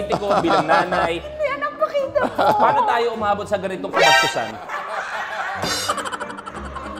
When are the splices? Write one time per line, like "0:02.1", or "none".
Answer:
none